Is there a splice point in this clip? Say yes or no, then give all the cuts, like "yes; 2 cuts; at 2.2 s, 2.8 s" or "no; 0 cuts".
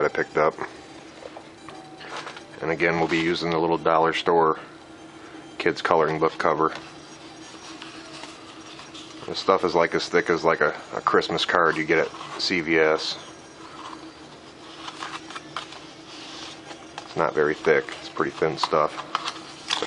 yes; 1 cut; at 18.4 s